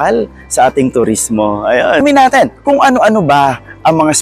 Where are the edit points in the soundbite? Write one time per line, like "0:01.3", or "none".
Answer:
0:02.0